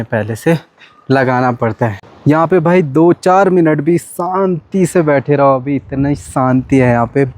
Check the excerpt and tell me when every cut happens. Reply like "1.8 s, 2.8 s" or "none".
2.2 s